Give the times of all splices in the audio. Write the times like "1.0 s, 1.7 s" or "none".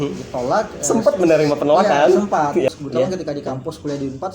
2.7 s